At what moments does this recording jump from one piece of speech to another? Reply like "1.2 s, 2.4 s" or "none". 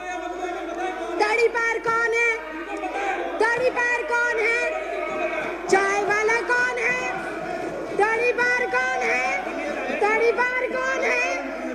none

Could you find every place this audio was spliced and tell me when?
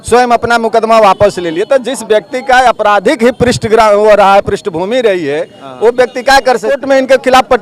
6.7 s

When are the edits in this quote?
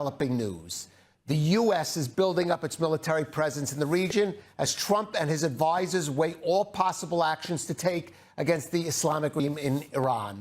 9.4 s

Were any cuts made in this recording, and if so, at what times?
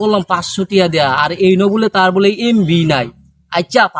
none

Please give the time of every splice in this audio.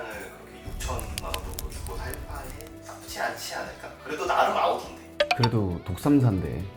none

